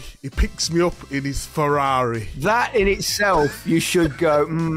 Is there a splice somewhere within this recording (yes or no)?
yes